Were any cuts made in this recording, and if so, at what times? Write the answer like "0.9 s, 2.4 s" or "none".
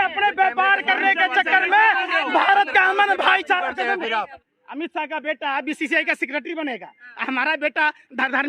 4.3 s